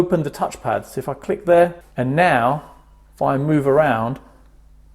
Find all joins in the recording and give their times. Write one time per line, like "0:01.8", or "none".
0:01.8